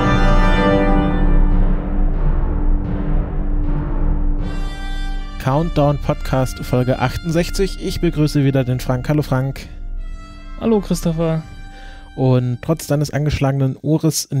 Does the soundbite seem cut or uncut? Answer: cut